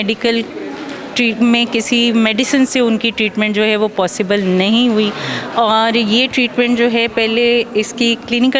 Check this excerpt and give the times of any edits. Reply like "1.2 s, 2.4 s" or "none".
none